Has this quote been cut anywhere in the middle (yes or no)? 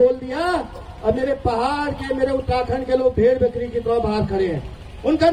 no